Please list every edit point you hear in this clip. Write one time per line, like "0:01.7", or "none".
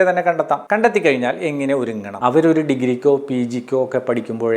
0:02.1